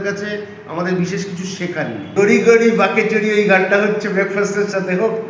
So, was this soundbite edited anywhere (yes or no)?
yes